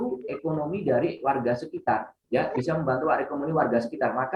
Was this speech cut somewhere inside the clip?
no; 0 cuts

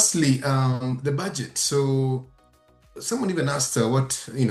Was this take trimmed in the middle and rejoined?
no; 0 cuts

